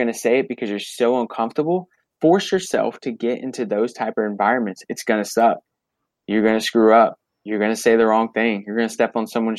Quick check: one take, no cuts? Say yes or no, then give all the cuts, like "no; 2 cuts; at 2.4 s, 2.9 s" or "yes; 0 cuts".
no; 1 cut; at 2.0 s